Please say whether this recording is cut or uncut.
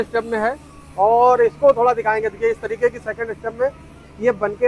uncut